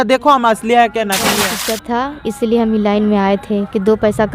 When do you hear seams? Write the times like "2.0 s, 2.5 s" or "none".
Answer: 1.5 s